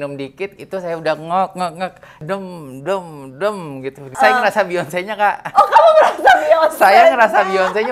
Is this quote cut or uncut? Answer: cut